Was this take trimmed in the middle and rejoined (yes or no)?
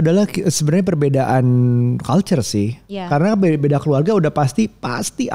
no